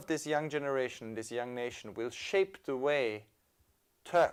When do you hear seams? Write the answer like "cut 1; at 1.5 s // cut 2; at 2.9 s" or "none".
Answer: none